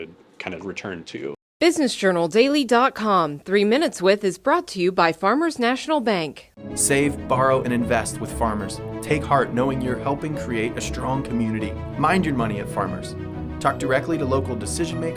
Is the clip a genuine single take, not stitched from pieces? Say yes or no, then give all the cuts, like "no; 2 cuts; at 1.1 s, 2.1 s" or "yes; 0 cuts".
no; 1 cut; at 1.5 s